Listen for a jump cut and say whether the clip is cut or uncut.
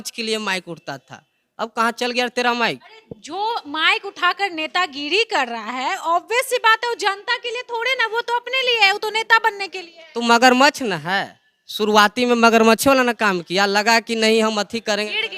uncut